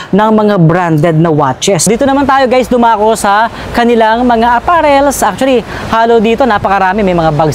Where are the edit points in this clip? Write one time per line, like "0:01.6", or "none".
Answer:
0:01.8

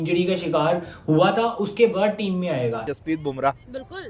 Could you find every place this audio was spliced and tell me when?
0:02.9

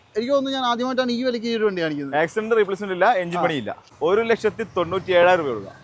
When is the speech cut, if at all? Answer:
0:03.9

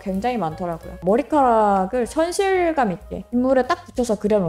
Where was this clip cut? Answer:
0:01.0

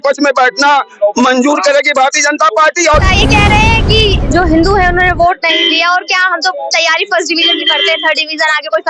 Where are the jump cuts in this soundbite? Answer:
0:03.1

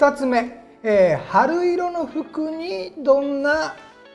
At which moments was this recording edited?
none

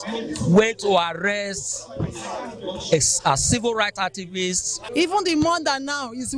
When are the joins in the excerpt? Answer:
0:04.7

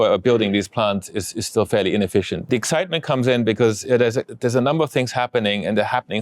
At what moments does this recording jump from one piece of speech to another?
0:02.5

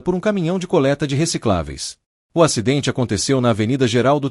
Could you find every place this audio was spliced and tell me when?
none

